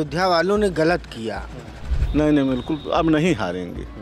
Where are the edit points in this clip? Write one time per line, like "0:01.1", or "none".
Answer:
0:02.0

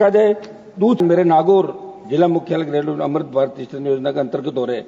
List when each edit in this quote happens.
0:01.0

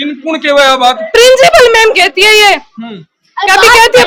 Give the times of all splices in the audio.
none

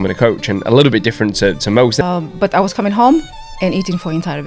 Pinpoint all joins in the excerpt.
0:02.0

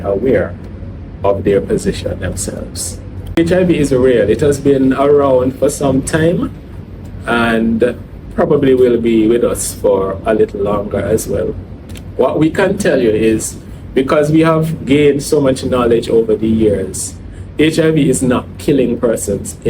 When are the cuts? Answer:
0:03.4

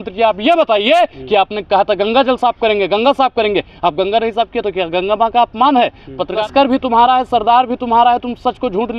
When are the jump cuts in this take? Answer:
0:06.4

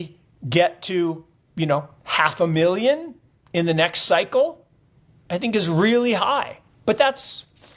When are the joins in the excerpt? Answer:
0:06.6

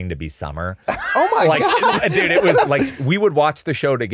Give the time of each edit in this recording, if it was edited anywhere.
0:02.7

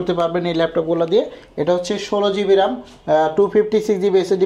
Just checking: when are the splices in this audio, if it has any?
none

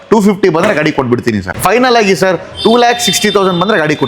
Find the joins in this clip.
0:01.5

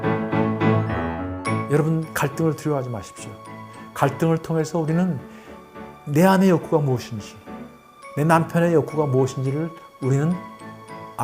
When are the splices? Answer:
0:01.3

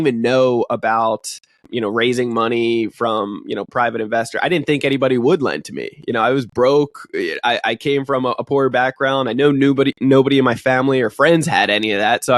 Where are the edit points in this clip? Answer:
0:01.6

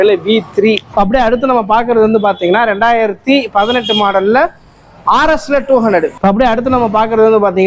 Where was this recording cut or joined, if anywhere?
0:00.8
0:06.1

